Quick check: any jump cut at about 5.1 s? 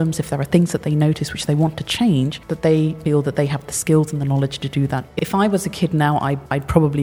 yes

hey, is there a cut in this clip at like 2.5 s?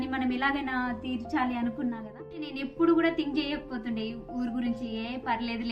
yes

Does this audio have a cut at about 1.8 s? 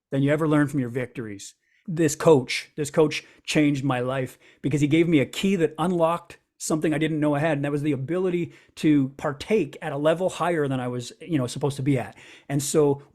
yes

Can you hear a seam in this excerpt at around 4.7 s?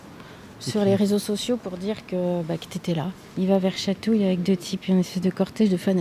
no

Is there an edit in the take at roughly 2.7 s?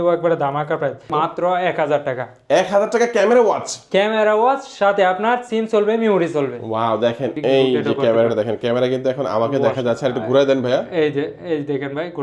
no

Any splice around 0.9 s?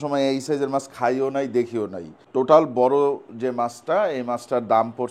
no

